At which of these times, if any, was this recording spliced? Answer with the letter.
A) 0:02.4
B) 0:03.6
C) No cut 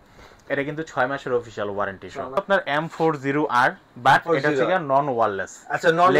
A